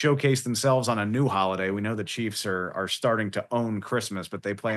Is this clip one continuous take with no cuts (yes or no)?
yes